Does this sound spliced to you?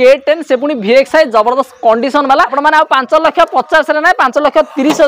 yes; 1 cut; at 2.5 s

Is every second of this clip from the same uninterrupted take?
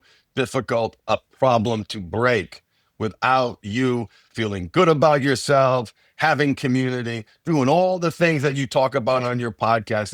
no; 1 cut; at 1.0 s

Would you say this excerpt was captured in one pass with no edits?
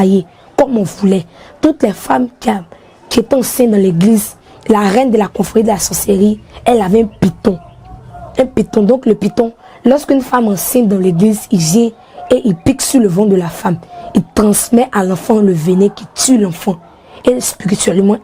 yes; 0 cuts

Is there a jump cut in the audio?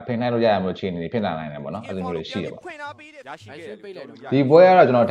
yes; 1 cut; at 3.0 s

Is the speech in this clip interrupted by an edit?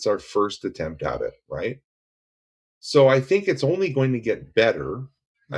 no; 0 cuts

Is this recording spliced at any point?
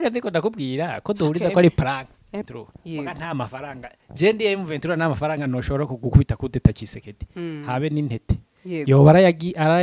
yes; 1 cut; at 2.4 s

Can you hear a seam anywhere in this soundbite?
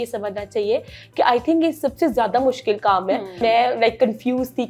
yes; 1 cut; at 3.4 s

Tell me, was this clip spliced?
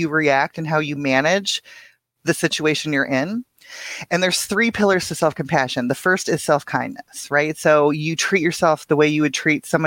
no; 0 cuts

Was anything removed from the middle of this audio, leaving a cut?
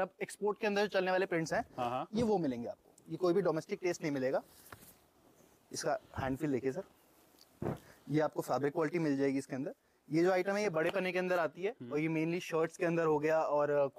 no; 0 cuts

